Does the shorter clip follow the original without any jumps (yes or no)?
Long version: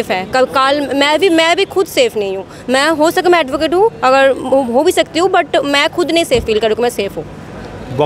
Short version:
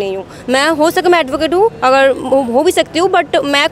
yes